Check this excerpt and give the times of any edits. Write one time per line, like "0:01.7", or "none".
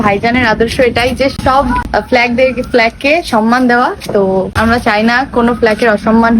0:01.4
0:04.5